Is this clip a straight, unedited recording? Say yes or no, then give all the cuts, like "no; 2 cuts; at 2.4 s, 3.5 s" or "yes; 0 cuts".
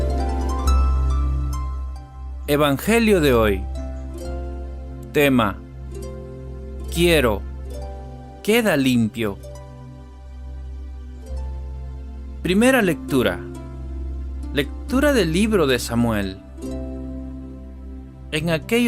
no; 1 cut; at 4.9 s